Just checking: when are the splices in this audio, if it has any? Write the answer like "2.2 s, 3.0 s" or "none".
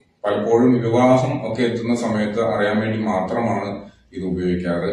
3.4 s